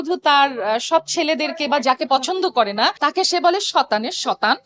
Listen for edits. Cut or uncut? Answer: uncut